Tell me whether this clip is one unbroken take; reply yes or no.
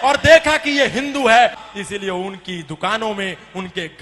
no